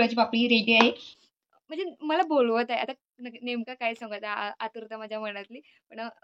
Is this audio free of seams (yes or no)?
no